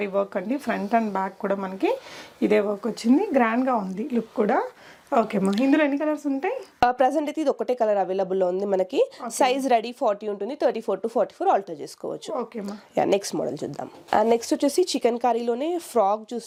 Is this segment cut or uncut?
uncut